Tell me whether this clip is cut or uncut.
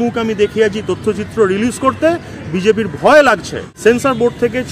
cut